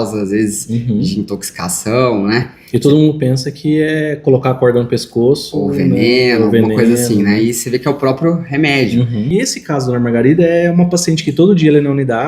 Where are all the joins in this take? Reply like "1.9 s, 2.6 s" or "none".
9.3 s